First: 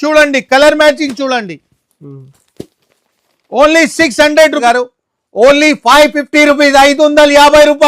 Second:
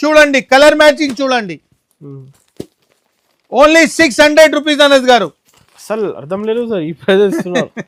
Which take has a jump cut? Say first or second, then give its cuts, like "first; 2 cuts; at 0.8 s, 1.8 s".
first; 1 cut; at 4.6 s